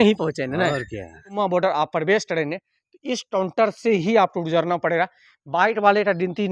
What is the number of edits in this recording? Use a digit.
1